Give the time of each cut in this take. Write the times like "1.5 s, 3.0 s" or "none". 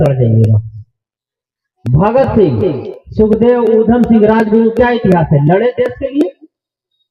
none